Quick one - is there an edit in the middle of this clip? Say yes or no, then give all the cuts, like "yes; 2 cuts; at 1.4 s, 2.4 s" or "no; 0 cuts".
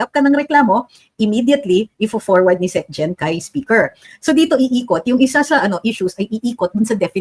no; 0 cuts